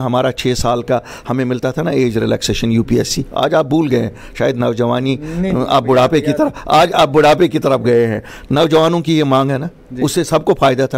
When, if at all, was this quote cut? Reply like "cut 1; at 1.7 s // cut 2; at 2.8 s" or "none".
none